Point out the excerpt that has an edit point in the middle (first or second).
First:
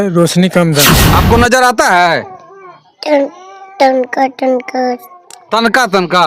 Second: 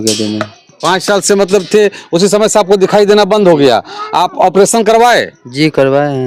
first